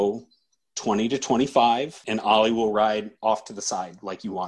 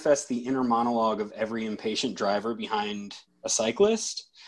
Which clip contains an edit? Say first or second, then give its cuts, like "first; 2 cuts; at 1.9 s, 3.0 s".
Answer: first; 1 cut; at 2.0 s